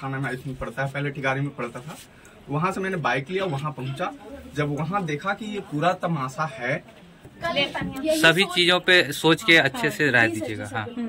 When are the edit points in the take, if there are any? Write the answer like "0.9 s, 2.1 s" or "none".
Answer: 7.3 s